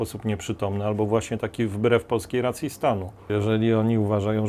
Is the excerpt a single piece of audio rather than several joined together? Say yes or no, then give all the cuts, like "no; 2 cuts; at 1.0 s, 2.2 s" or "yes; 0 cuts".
no; 1 cut; at 3.2 s